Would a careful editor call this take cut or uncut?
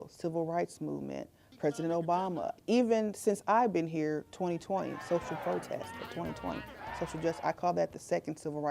cut